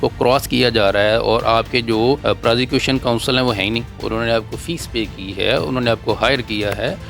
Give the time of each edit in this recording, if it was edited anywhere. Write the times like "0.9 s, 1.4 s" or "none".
2.2 s, 3.9 s